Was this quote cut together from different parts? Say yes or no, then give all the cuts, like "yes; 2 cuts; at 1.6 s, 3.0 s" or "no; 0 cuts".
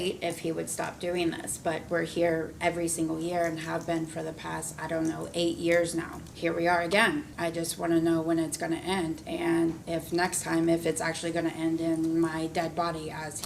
yes; 4 cuts; at 6.2 s, 7.3 s, 9.2 s, 9.8 s